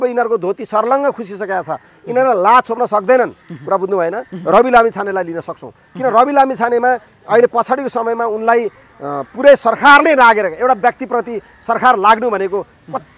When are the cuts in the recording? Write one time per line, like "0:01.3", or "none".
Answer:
0:04.3

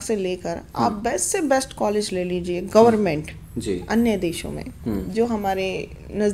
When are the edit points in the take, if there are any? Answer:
none

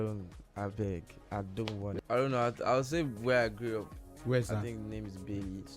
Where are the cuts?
0:01.8

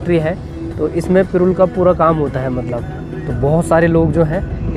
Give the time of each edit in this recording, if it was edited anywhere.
none

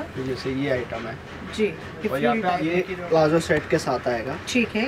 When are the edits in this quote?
0:02.6

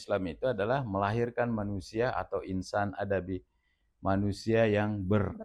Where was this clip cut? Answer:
none

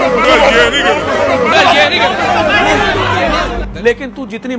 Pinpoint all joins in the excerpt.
0:03.6

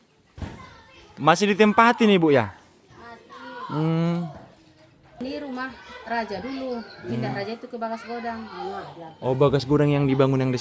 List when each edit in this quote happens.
0:05.2

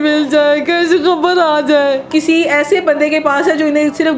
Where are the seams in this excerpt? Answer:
0:02.1

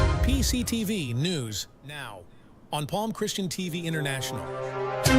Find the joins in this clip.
0:03.5

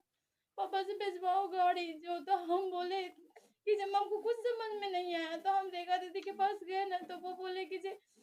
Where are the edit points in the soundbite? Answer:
none

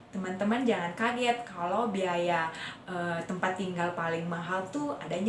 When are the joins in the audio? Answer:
none

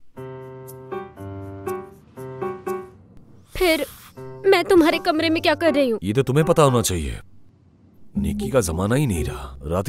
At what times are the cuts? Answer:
none

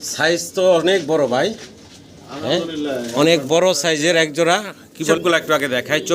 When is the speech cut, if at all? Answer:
0:05.2

